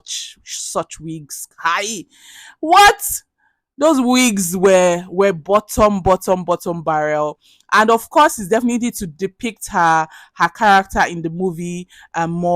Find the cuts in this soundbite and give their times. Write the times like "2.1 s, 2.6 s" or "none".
none